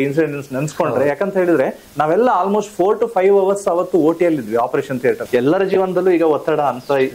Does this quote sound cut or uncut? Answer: cut